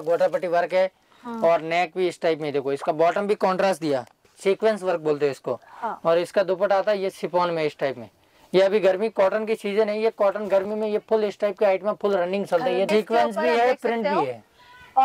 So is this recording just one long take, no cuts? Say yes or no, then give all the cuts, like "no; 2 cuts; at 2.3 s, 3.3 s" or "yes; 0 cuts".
no; 2 cuts; at 4.3 s, 12.9 s